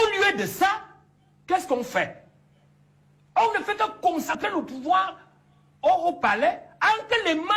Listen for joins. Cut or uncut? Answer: cut